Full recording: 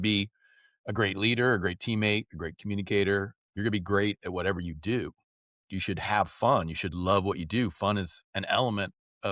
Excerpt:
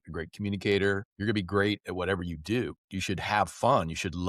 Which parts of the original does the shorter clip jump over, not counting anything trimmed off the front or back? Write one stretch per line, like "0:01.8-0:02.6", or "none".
0:03.4-0:03.5
0:05.2-0:05.7